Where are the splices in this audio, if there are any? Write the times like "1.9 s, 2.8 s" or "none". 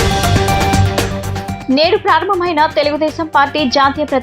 1.4 s